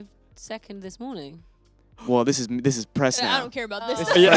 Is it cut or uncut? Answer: uncut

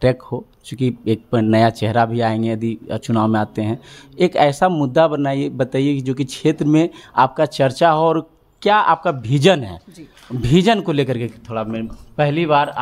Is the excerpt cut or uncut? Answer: uncut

